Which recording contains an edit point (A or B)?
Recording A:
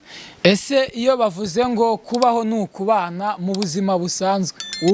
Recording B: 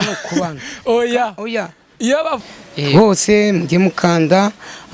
B